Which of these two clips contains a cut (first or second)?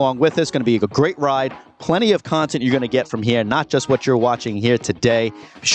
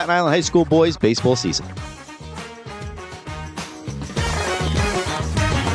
second